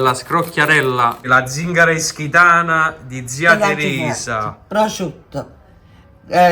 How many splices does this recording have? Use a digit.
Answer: 1